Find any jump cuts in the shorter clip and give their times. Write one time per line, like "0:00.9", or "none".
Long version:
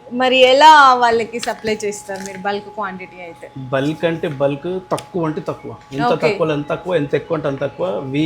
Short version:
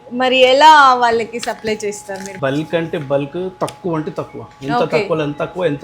0:02.3